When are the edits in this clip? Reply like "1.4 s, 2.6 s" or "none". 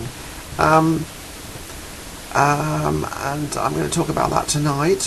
4.1 s